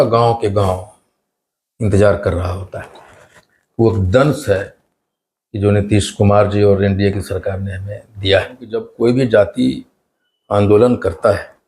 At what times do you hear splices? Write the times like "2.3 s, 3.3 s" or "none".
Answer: 8.8 s